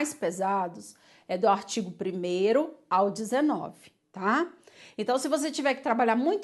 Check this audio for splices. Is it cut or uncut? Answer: cut